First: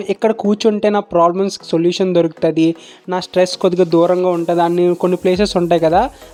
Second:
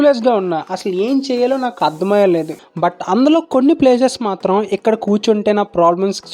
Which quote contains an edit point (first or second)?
second